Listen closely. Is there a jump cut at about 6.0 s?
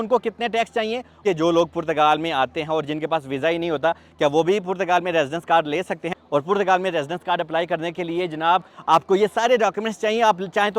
yes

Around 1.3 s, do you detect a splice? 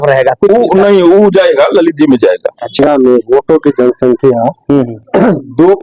no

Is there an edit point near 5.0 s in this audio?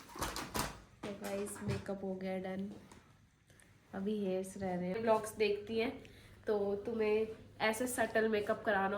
yes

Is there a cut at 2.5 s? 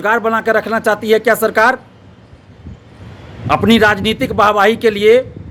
no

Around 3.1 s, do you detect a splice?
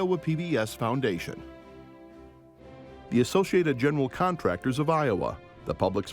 yes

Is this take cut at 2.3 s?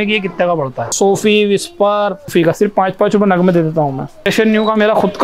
yes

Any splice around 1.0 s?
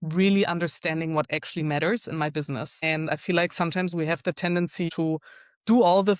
no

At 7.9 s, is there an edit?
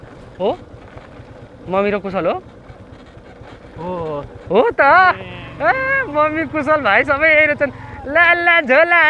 no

